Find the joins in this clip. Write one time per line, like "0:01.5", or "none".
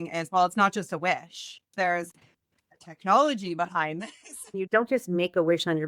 0:01.7
0:04.6